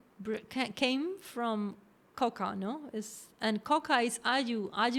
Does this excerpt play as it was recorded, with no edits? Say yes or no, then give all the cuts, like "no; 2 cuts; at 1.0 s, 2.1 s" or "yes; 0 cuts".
yes; 0 cuts